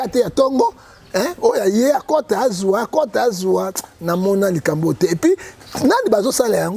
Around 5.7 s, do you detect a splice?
no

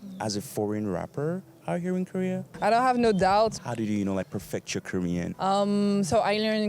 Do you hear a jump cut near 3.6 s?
yes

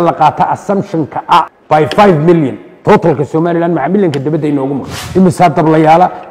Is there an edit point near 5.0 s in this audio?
yes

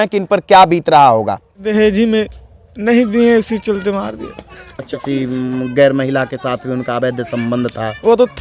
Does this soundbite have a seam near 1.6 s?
yes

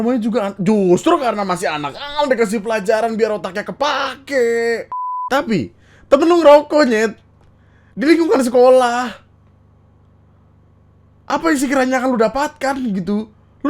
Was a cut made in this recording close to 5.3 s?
yes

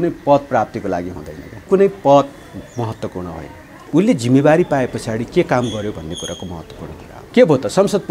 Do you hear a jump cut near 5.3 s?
no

